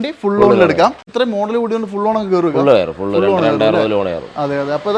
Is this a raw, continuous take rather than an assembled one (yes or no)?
no